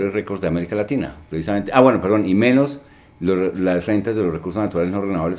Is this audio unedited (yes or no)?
no